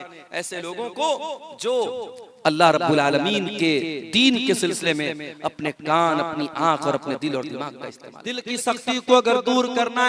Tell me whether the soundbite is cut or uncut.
cut